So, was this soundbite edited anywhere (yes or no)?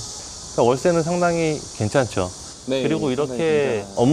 no